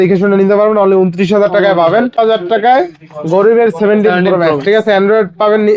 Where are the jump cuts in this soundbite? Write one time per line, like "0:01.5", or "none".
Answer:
0:02.2